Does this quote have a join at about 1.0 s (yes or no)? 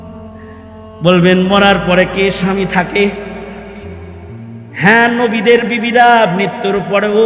yes